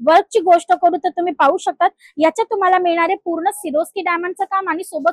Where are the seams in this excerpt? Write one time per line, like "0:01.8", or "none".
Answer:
none